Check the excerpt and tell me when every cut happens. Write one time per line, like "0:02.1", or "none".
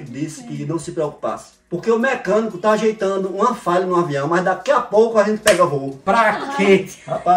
0:01.5
0:05.9